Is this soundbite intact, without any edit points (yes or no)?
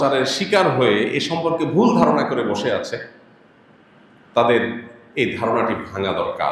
yes